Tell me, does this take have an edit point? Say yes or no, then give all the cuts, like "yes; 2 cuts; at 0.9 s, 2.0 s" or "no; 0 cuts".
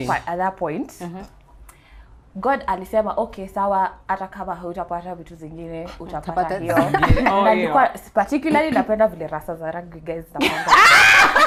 no; 0 cuts